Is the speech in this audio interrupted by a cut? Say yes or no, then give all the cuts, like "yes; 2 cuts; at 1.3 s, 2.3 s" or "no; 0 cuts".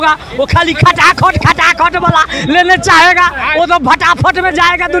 no; 0 cuts